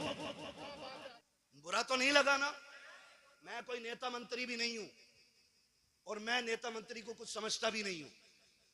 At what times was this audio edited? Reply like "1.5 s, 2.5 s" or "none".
1.2 s